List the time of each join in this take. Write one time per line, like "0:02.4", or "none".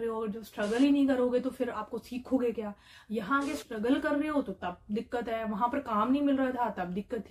none